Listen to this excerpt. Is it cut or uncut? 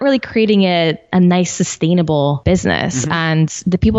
cut